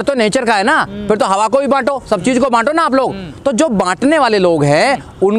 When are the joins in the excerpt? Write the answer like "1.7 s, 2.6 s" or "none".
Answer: none